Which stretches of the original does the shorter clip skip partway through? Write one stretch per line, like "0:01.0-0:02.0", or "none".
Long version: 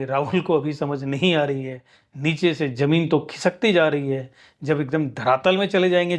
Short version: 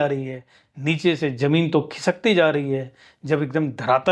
none